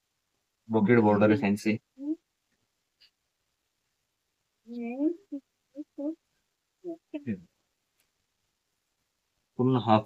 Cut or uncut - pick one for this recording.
uncut